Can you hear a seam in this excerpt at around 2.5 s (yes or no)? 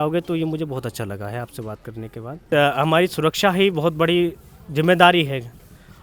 yes